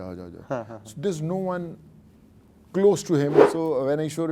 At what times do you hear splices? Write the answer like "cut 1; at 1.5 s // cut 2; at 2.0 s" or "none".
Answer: cut 1; at 3.4 s